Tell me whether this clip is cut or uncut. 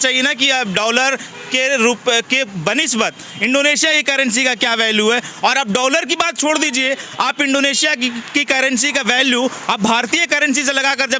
uncut